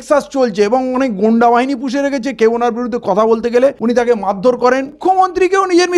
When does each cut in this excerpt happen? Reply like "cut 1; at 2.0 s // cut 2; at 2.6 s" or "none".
cut 1; at 3.8 s // cut 2; at 5.0 s